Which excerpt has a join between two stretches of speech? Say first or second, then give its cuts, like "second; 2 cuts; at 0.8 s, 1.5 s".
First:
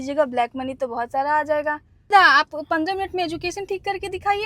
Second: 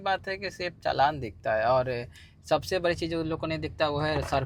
first; 1 cut; at 2.1 s